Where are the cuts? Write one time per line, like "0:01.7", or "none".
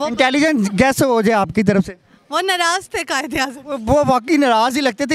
0:04.0